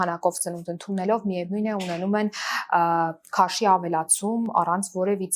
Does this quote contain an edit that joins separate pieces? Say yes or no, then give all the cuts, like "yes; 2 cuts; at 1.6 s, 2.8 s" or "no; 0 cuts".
no; 0 cuts